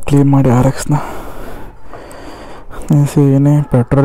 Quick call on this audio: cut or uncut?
uncut